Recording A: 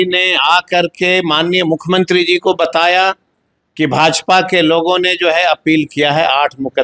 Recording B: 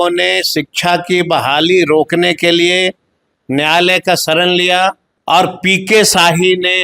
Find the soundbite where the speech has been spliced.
B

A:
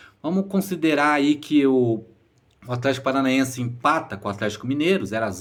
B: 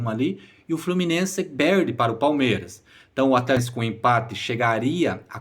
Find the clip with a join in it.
B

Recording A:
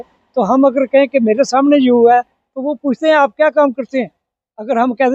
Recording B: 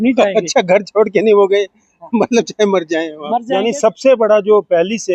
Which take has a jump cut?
B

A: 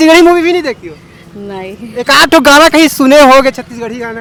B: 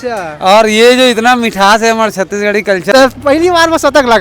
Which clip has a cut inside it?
B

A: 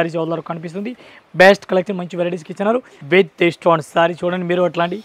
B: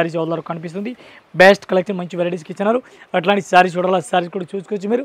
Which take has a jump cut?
A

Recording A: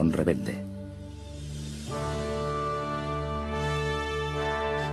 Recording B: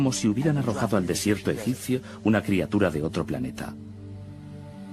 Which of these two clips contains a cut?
B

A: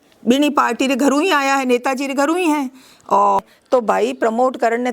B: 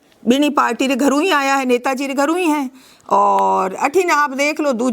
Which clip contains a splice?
A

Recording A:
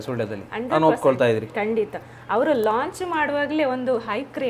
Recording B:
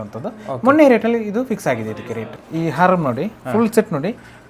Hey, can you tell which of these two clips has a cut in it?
B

